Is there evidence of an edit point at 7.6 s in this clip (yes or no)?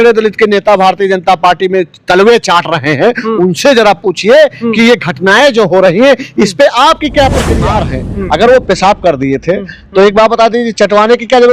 yes